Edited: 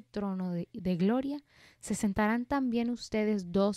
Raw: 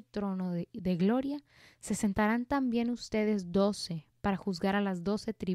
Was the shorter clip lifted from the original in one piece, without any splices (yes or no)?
yes